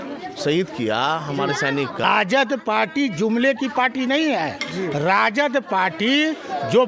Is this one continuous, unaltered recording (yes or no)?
no